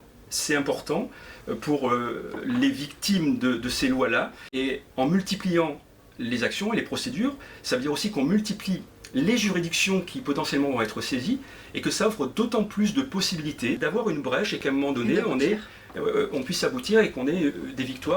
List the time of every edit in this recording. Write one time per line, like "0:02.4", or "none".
0:04.4
0:13.8

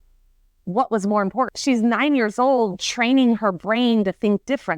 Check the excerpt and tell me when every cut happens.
0:01.5

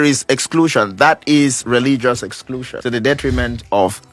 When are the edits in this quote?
0:02.7

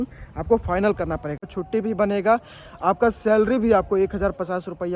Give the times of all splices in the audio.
0:01.4

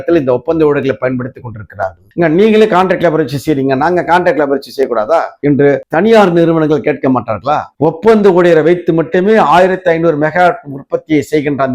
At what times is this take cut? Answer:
0:02.0
0:07.7

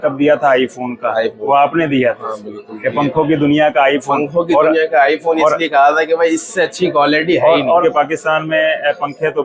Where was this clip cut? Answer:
0:07.8

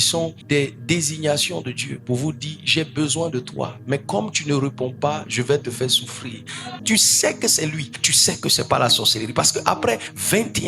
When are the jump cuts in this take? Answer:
0:06.8

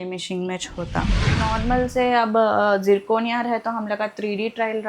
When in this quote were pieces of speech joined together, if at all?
0:01.3

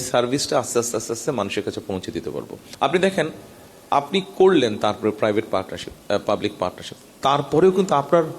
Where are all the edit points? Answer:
0:02.6

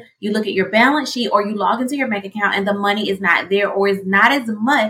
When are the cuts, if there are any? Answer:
none

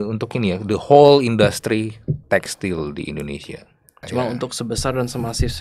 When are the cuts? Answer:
0:04.1

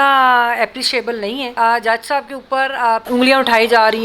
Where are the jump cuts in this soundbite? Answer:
0:01.4
0:03.0

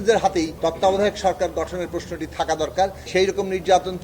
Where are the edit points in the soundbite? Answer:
0:03.0

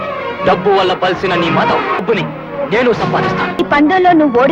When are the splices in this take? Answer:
0:02.0
0:03.6

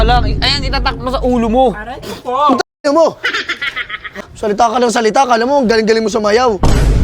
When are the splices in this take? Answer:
0:04.2

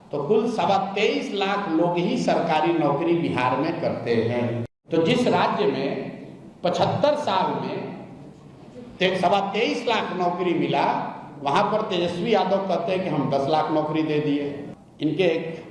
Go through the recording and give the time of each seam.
0:04.7
0:14.6

